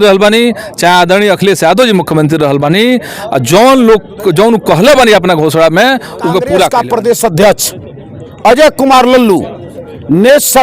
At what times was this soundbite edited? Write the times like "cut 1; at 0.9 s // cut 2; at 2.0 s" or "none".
cut 1; at 6.7 s